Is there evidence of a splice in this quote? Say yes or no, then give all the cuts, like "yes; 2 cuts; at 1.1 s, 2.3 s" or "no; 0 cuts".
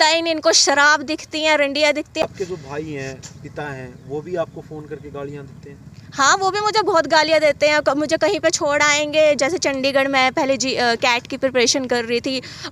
no; 0 cuts